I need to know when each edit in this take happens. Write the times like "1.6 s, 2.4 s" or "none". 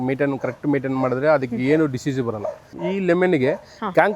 2.8 s